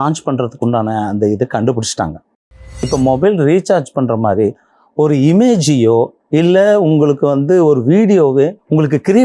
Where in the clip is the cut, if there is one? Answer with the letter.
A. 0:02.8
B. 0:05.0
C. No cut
A